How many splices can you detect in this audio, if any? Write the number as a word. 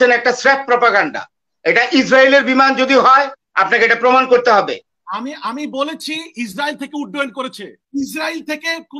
one